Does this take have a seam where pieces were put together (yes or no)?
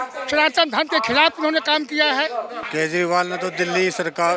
yes